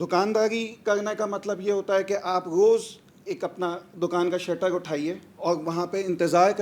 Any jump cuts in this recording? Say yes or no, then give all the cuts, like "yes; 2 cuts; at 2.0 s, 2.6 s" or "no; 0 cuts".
no; 0 cuts